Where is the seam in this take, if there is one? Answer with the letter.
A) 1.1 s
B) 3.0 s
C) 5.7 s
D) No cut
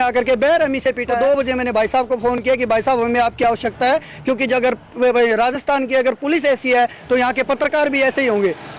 A